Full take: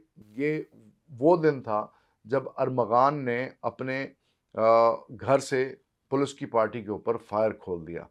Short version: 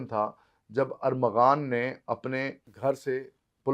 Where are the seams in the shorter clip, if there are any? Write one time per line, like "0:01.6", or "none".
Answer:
0:02.7